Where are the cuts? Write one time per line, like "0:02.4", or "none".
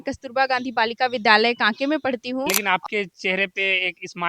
0:02.6